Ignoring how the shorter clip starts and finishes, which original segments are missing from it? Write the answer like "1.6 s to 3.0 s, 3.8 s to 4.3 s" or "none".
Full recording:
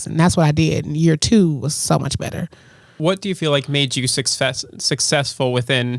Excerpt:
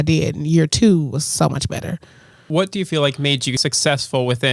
4.1 s to 4.8 s